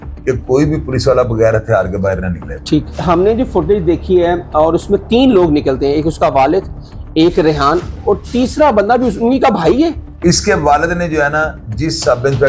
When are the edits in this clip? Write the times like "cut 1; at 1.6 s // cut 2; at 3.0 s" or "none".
cut 1; at 2.9 s // cut 2; at 10.1 s